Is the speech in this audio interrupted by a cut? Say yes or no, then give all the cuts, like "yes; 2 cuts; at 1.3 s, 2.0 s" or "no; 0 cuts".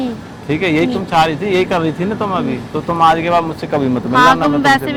no; 0 cuts